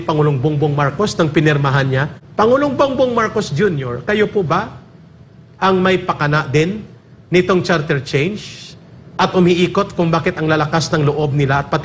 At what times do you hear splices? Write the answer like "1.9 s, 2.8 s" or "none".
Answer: 2.2 s